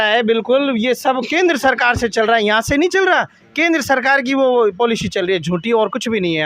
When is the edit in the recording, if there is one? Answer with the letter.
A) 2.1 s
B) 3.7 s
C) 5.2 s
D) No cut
D